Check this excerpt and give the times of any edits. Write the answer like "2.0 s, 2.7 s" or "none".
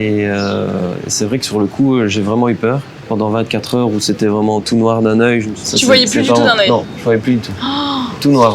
5.5 s